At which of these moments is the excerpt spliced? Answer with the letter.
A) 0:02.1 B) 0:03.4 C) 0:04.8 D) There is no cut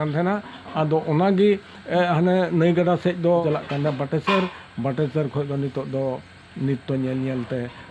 B